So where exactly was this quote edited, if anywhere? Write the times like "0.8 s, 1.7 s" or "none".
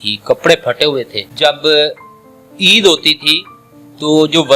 1.2 s